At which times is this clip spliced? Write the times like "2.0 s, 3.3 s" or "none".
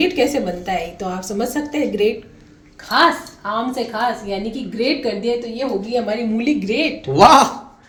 none